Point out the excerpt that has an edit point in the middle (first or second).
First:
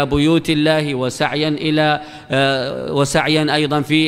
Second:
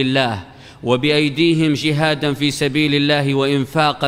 first